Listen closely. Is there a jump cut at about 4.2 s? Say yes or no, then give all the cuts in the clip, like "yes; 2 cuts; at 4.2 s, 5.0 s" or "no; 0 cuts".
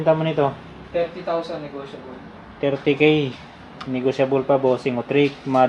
no; 0 cuts